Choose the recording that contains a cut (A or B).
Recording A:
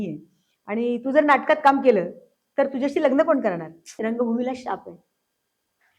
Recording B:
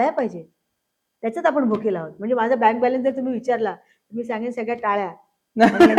A